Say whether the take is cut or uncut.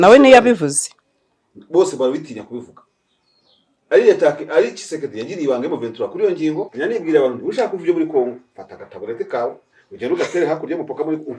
cut